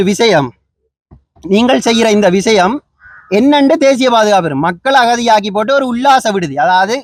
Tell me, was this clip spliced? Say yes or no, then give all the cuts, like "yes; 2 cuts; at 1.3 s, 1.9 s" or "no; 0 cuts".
no; 0 cuts